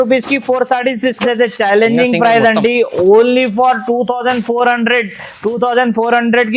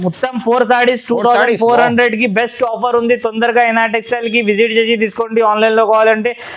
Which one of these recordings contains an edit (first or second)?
first